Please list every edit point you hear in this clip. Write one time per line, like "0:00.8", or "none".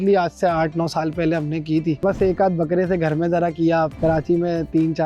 0:02.0
0:03.9